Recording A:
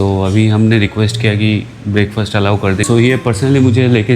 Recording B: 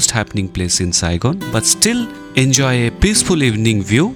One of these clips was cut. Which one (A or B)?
A